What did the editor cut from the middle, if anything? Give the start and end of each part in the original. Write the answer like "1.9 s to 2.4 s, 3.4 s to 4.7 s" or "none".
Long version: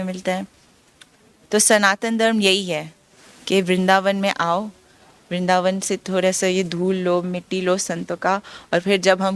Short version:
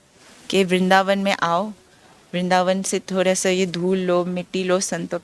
none